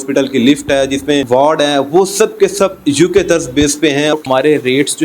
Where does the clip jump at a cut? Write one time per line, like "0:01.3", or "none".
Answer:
0:01.2
0:04.1